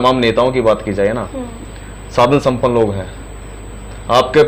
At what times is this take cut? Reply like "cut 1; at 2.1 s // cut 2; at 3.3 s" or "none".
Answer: none